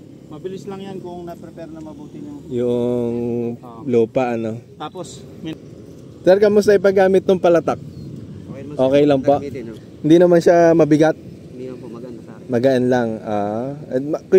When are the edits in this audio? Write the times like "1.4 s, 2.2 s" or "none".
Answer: 5.5 s